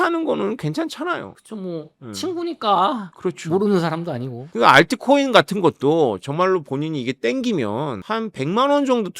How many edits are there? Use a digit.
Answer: 0